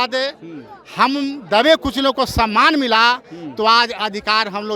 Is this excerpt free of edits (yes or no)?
yes